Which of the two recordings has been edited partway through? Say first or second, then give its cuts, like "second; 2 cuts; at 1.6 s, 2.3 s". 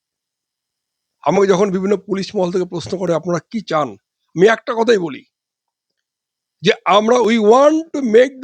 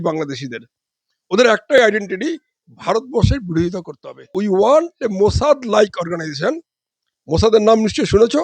second; 1 cut; at 4.3 s